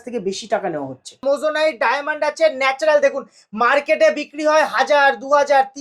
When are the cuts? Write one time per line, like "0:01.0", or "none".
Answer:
0:01.2